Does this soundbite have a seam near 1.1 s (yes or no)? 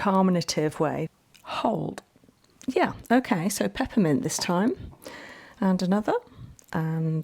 yes